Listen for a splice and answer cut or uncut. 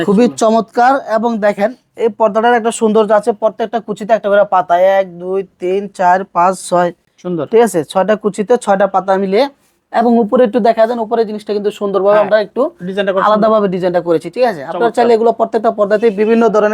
uncut